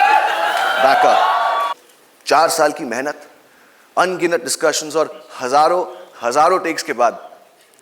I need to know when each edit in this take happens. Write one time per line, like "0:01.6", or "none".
0:01.7